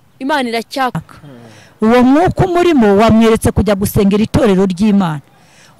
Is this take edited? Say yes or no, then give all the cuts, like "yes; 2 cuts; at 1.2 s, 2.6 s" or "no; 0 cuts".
yes; 1 cut; at 1.0 s